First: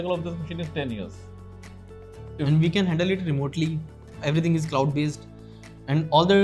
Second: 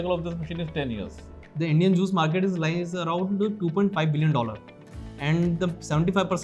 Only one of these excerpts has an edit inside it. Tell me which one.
second; 1 cut; at 1.4 s

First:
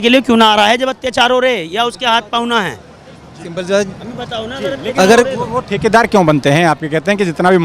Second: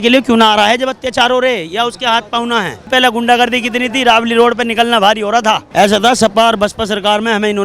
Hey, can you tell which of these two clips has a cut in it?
second; 2 cuts; at 2.9 s, 5.6 s

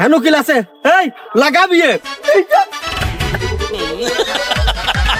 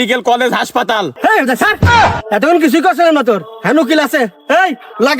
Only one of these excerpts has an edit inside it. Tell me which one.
second; 1 cut; at 1.1 s

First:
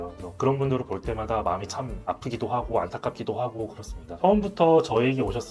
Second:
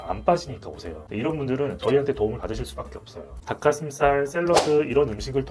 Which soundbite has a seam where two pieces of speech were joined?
second; 1 cut; at 3.2 s

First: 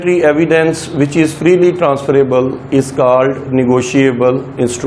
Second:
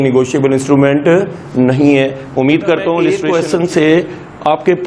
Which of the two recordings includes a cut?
second; 1 cut; at 3.1 s

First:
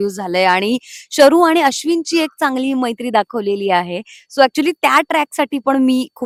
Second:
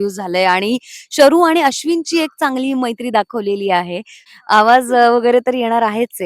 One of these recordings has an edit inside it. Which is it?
second; 1 cut; at 4.2 s

